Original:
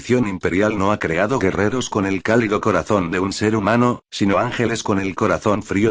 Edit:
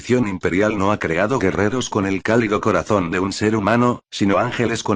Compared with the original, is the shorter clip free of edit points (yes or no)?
yes